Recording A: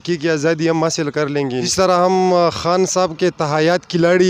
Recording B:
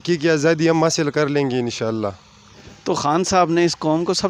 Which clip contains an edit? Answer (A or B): A